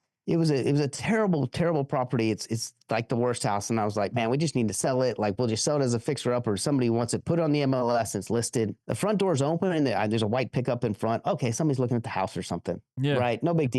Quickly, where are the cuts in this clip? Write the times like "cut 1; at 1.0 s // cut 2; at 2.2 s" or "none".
cut 1; at 8.8 s